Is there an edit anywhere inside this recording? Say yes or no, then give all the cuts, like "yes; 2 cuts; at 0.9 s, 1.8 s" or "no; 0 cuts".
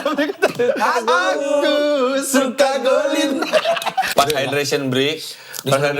yes; 1 cut; at 4.1 s